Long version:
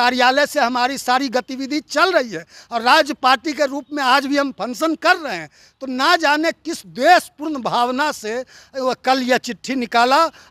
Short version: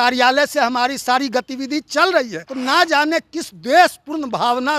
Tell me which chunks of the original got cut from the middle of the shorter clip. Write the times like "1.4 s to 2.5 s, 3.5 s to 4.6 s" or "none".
2.4 s to 5.8 s